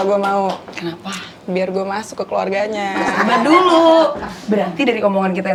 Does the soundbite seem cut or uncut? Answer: uncut